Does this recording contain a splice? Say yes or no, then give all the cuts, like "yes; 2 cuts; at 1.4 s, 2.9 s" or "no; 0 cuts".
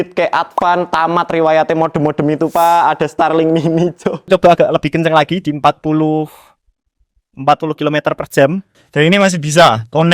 yes; 1 cut; at 4.3 s